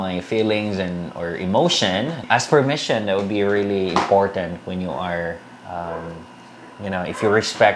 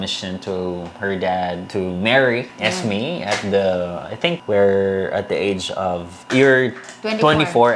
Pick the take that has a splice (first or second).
first